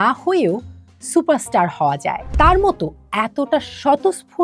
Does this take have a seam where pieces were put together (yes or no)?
yes